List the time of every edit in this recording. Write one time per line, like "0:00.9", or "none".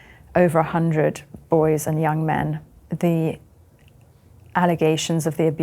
0:02.8